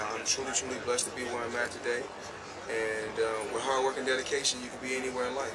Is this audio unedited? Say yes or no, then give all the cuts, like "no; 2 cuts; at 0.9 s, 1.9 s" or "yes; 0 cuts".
no; 1 cut; at 3.4 s